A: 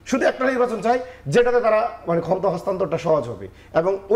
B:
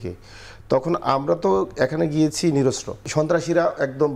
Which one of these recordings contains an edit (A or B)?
B